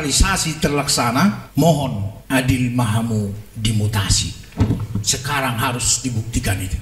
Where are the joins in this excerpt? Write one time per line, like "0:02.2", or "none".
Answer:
0:01.4
0:02.1